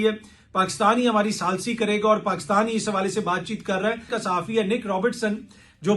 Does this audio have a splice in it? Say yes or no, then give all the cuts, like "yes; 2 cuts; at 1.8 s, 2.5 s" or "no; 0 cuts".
yes; 1 cut; at 4.1 s